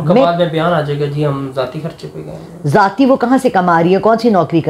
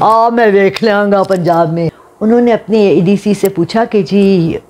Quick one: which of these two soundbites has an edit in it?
second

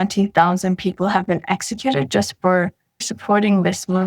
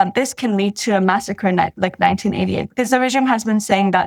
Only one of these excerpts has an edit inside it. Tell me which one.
first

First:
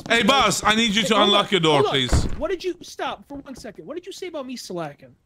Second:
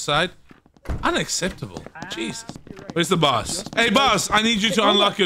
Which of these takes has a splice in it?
second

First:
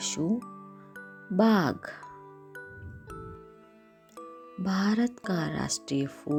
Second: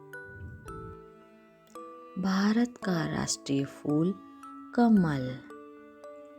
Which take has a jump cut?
second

